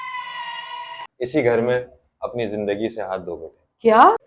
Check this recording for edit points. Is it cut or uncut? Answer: cut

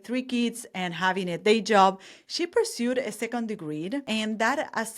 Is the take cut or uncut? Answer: cut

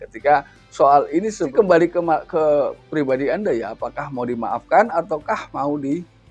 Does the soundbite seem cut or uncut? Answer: cut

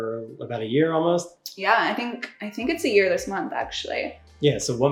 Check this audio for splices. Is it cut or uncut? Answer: uncut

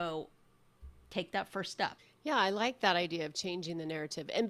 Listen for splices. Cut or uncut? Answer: uncut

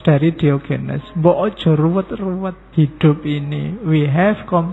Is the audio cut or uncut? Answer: cut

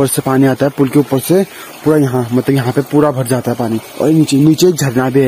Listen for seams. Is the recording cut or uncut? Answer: cut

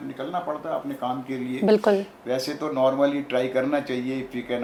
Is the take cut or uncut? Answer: uncut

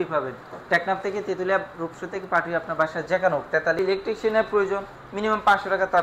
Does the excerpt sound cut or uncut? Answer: cut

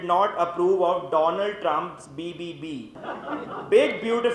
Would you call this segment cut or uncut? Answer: cut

